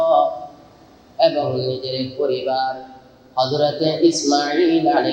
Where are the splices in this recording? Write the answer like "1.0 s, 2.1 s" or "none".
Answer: none